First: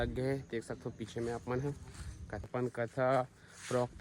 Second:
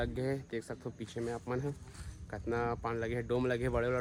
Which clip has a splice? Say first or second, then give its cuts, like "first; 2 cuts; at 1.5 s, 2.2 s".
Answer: first; 1 cut; at 2.5 s